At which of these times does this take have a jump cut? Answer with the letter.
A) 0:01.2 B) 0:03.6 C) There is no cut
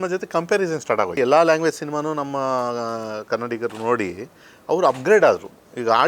A